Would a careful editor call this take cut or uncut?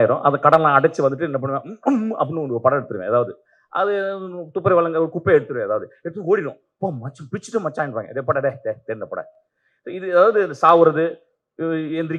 uncut